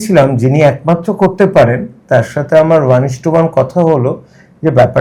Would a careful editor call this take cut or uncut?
uncut